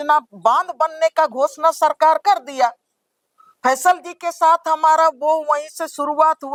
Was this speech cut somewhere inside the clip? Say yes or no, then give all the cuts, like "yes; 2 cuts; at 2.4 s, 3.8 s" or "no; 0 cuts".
no; 0 cuts